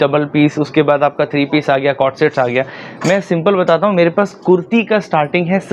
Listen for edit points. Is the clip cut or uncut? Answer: uncut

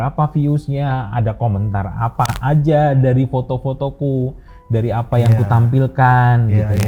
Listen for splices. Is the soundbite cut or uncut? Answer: uncut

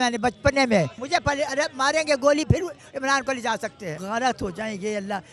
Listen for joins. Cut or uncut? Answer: cut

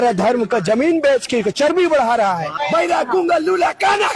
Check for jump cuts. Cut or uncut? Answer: cut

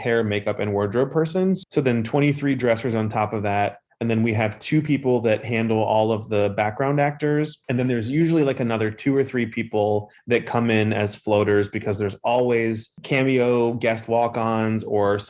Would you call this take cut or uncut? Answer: cut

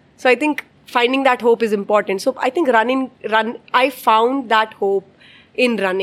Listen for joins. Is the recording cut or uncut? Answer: uncut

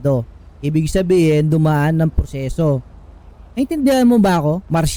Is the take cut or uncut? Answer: uncut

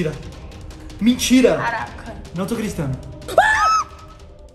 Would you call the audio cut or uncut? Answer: cut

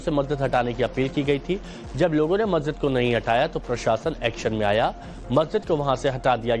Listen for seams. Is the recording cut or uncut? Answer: cut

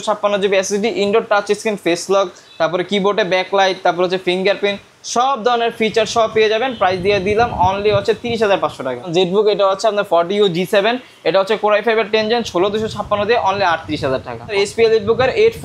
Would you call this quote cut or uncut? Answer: cut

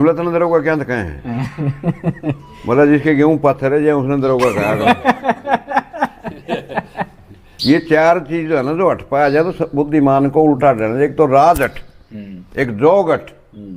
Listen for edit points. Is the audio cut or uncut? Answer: cut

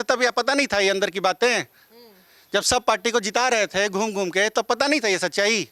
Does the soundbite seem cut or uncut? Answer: uncut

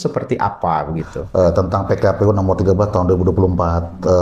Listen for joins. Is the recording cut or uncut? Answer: cut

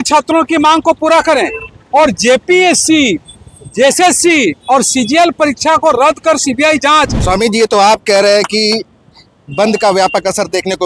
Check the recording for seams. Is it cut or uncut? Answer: cut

